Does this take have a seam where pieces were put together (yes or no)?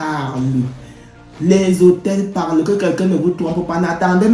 no